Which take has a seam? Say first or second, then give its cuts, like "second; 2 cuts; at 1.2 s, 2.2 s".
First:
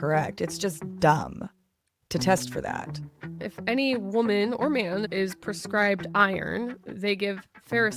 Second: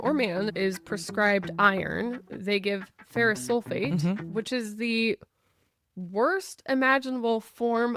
first; 1 cut; at 3.4 s